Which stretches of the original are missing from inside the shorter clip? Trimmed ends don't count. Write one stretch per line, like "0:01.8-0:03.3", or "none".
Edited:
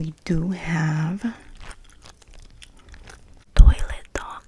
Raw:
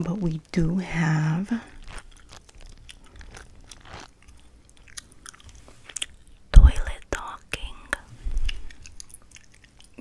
0:03.7-0:06.4